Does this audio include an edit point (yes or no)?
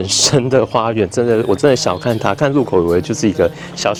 no